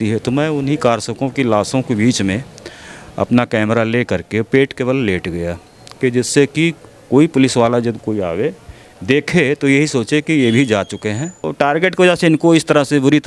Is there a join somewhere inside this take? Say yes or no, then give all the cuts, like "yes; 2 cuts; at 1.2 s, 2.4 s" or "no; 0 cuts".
yes; 1 cut; at 11.4 s